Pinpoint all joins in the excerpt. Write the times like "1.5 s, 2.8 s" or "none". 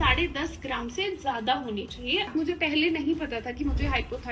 2.3 s